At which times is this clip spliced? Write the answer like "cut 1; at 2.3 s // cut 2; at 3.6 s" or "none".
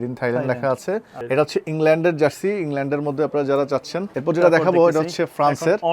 cut 1; at 1.1 s // cut 2; at 4.1 s